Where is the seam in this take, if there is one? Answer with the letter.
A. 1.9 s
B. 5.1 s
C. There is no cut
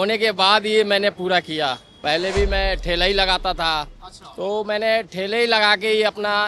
A